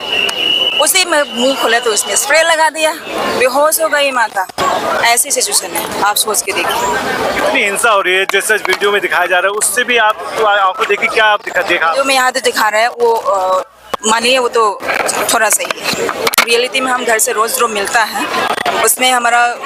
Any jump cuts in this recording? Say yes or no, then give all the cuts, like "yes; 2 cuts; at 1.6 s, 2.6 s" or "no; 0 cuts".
no; 0 cuts